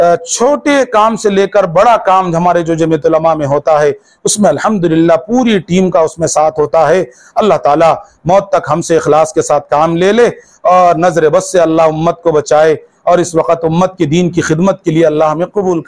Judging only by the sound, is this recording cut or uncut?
uncut